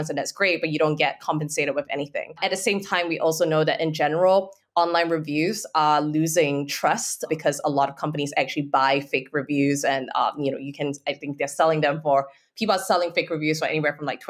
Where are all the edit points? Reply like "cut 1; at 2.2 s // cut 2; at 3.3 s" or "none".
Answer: cut 1; at 2.4 s // cut 2; at 7.3 s